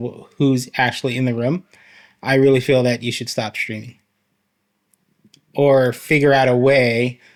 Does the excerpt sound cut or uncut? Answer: uncut